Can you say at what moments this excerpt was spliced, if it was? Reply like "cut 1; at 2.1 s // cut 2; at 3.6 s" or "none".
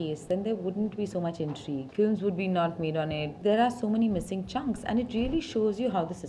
cut 1; at 1.9 s // cut 2; at 3.3 s